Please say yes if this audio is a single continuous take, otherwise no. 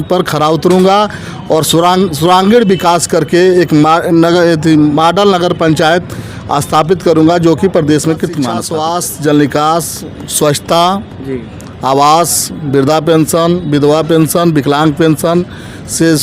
no